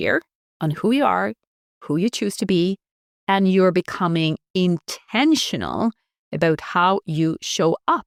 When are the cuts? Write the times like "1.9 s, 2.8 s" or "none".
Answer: none